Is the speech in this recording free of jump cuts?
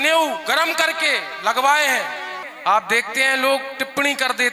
no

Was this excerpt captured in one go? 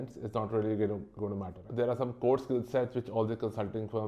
no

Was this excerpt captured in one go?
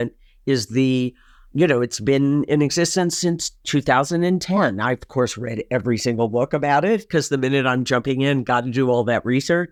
yes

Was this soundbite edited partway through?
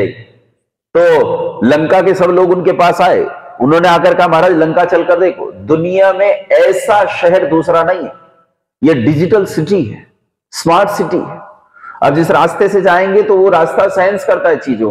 no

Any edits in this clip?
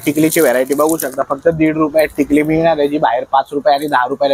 no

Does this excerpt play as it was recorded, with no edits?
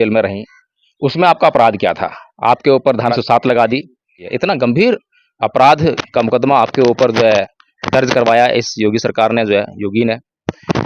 no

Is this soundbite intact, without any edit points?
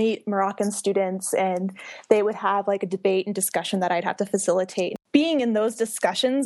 no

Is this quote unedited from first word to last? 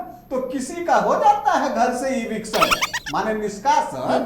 yes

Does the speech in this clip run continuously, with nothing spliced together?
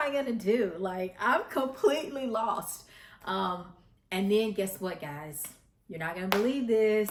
yes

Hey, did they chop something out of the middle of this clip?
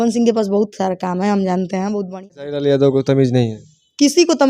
yes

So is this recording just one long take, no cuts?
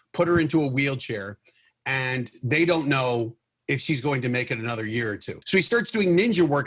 no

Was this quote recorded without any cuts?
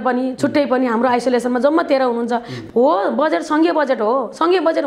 no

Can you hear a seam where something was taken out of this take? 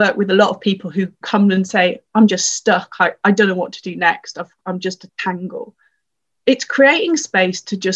yes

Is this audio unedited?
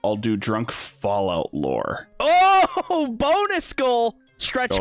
yes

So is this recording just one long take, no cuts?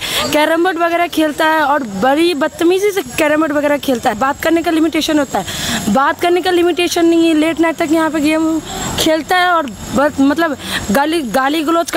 no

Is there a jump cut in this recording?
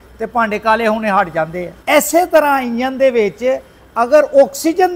yes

